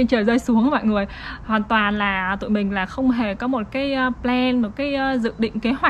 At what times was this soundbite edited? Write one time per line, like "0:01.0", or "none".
none